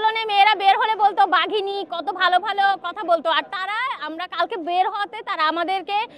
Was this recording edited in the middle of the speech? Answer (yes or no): no